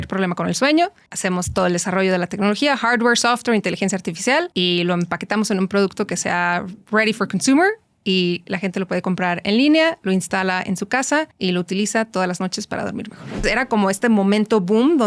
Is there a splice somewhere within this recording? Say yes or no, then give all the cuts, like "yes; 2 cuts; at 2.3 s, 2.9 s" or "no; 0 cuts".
yes; 4 cuts; at 1.1 s, 4.5 s, 11.3 s, 13.4 s